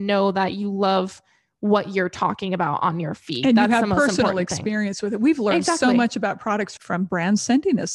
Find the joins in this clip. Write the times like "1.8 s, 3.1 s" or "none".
6.8 s